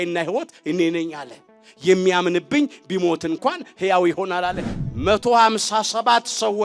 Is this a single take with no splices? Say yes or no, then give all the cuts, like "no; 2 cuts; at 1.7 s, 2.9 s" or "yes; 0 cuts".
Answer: no; 1 cut; at 4.7 s